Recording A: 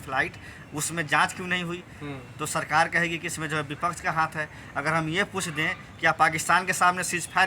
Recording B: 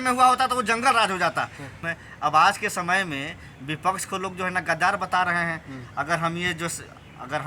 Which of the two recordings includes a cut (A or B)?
B